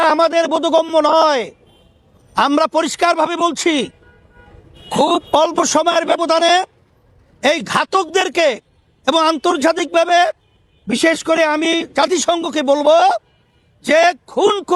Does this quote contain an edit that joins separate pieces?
no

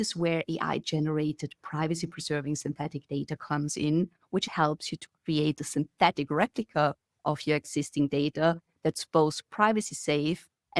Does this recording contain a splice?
yes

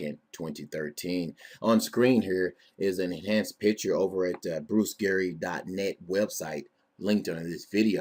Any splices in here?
no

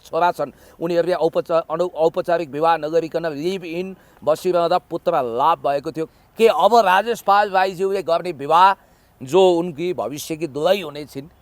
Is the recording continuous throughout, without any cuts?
no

